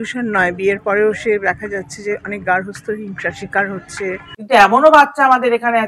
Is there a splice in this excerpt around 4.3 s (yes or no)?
yes